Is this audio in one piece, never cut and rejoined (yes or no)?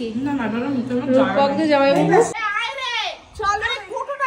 no